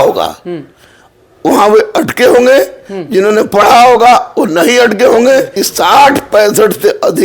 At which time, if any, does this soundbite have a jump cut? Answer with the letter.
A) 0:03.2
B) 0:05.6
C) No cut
B